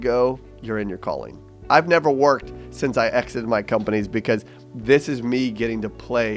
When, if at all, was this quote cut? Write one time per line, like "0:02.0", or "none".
0:01.5